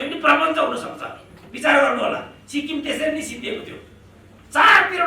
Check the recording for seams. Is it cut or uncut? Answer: uncut